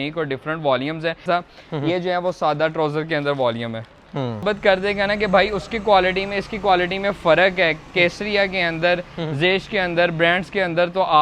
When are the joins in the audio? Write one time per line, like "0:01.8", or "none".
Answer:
0:01.2
0:04.4